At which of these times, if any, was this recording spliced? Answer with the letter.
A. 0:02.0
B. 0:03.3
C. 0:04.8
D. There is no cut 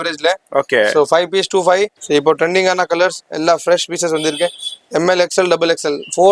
A